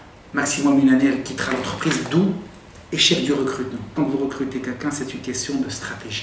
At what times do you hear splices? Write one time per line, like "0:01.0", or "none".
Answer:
0:03.9